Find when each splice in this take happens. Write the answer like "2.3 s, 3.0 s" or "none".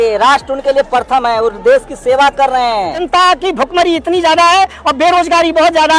3.0 s